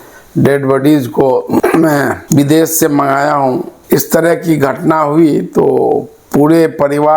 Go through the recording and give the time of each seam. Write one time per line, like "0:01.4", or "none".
0:03.7